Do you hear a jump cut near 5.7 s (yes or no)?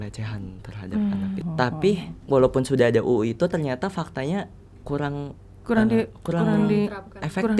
no